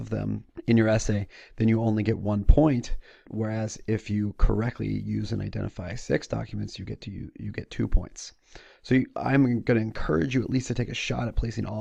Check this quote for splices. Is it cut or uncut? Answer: uncut